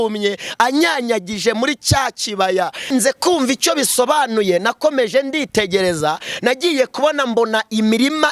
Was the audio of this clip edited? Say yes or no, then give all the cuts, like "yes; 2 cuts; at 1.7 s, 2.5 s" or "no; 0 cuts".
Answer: yes; 1 cut; at 2.9 s